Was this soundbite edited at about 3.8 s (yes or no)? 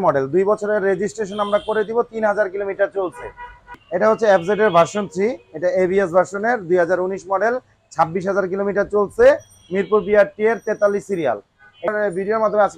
yes